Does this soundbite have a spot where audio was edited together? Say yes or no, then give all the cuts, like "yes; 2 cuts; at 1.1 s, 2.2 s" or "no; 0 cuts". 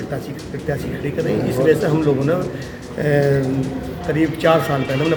no; 0 cuts